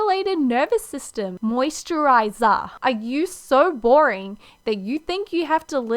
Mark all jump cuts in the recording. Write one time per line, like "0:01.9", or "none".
0:01.3